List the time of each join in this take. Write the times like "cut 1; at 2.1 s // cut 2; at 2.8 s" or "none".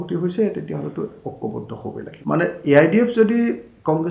cut 1; at 2.1 s